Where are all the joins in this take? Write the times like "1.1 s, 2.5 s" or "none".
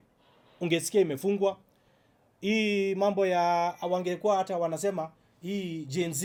none